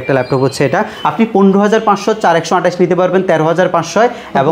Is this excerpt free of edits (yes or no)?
no